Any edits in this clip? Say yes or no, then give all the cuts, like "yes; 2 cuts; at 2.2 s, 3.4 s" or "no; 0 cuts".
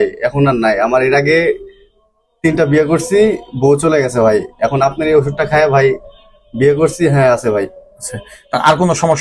no; 0 cuts